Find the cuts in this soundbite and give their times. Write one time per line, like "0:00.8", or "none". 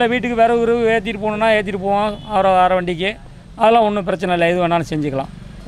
none

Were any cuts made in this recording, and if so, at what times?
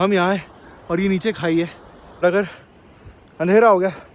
0:02.2

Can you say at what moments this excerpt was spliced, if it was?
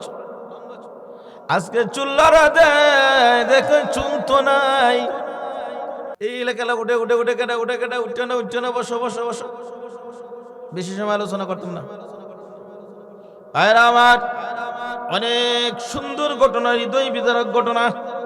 0:06.1

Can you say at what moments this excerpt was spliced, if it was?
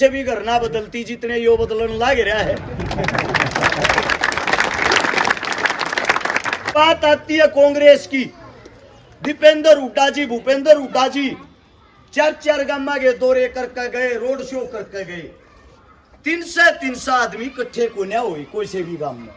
0:06.7

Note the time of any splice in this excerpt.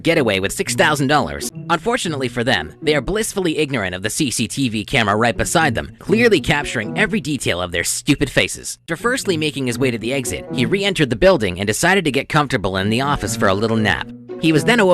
0:01.5
0:08.9

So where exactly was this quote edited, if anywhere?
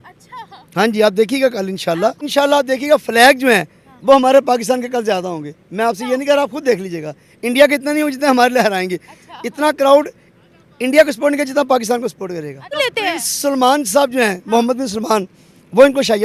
0:02.3
0:12.8

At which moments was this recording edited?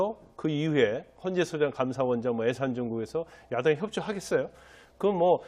none

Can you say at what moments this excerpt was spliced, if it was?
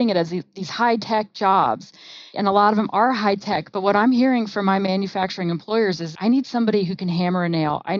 0:02.3
0:06.1

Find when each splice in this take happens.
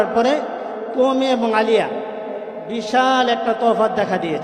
none

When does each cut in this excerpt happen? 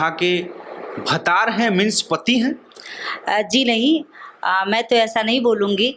none

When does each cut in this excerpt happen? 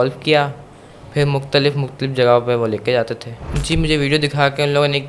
0:03.5

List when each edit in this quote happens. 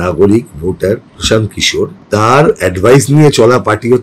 0:02.0

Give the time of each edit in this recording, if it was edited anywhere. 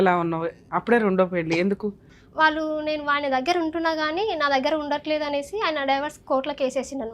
0:02.1

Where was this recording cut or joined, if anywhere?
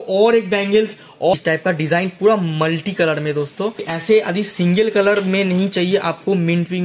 0:01.3
0:03.9

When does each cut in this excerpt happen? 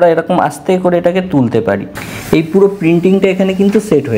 0:01.9

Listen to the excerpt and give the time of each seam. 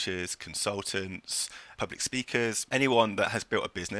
0:01.6
0:02.6

